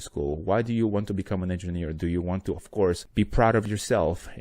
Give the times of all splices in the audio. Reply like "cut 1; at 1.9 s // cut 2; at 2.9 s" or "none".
cut 1; at 3.0 s